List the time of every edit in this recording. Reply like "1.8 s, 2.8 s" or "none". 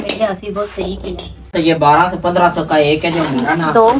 1.5 s

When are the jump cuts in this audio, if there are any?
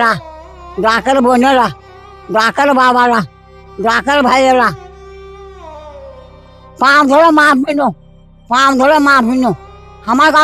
5.0 s, 6.8 s

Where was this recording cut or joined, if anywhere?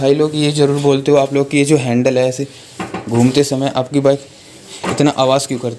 none

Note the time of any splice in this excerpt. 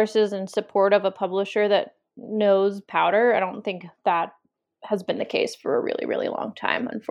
none

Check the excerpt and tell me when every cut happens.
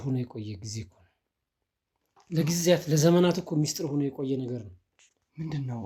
none

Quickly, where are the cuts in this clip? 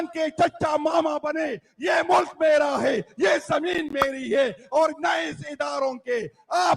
none

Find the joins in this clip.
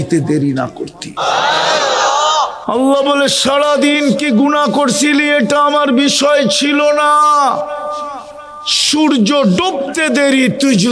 1.0 s

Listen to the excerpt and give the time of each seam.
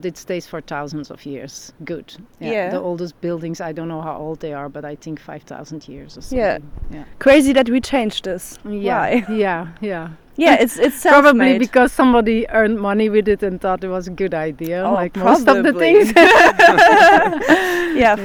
none

